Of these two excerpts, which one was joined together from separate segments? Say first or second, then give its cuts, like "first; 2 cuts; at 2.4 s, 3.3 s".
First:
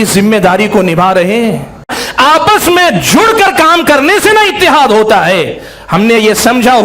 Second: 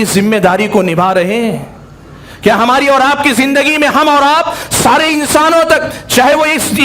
first; 1 cut; at 2.0 s